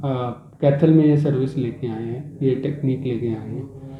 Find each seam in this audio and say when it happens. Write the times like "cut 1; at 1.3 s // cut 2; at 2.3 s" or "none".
none